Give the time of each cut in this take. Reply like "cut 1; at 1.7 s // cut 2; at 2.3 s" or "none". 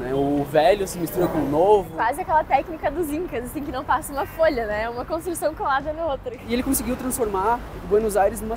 cut 1; at 1.9 s // cut 2; at 6.3 s